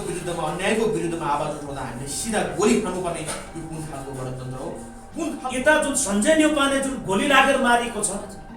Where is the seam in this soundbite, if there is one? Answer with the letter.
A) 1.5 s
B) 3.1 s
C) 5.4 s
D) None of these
C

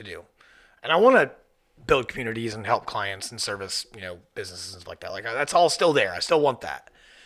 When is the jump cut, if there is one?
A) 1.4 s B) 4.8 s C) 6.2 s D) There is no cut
D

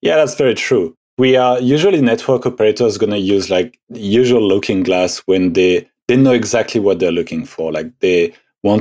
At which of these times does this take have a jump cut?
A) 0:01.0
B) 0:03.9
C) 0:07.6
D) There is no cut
A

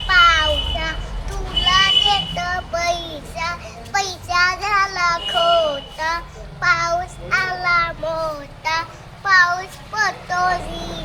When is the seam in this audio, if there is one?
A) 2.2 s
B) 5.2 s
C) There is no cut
C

